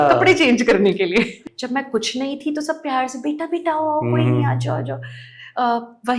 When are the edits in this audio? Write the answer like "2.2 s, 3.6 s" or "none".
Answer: 1.4 s